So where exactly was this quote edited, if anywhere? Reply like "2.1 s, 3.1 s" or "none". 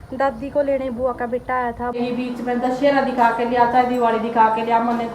2.0 s